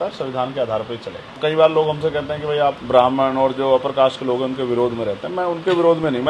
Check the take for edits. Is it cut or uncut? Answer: cut